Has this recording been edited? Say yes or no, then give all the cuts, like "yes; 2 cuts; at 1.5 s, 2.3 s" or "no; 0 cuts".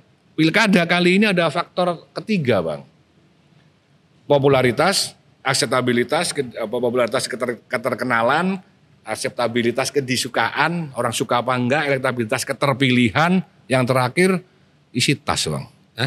no; 0 cuts